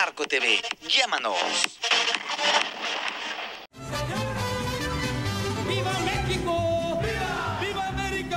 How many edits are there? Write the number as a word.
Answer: zero